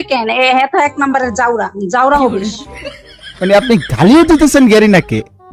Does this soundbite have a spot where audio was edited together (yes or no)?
no